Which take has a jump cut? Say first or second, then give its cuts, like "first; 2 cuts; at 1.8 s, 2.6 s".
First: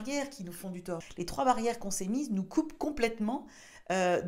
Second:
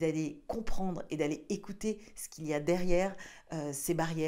first; 1 cut; at 1.0 s